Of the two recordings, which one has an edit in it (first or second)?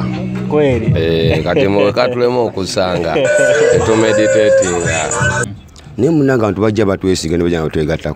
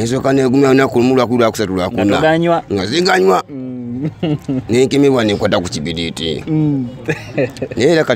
first